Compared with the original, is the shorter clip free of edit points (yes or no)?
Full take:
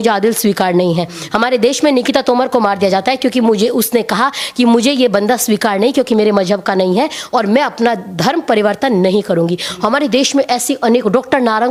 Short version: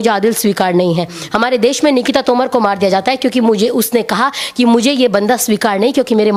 yes